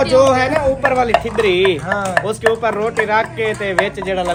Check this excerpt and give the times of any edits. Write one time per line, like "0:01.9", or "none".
none